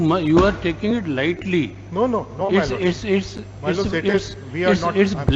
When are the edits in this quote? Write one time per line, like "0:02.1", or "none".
none